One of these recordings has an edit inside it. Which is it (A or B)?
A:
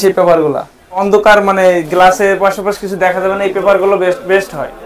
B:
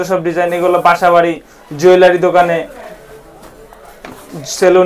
A